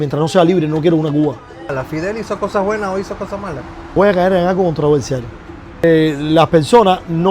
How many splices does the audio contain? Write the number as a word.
three